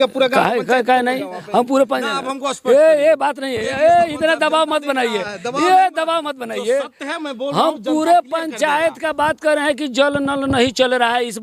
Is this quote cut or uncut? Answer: uncut